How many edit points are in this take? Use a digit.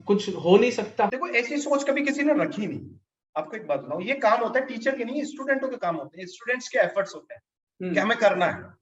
1